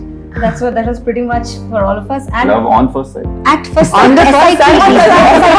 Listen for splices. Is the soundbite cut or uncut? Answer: uncut